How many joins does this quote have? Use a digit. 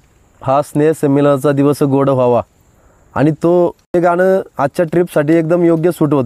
1